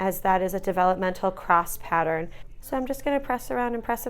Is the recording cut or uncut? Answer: cut